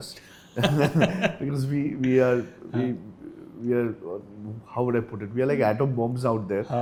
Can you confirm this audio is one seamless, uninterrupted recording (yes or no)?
yes